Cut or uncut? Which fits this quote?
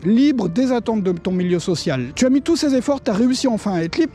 cut